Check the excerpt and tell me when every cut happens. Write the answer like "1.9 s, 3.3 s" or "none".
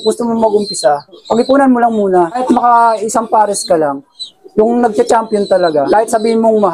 1.1 s, 2.4 s, 4.2 s, 4.9 s, 5.9 s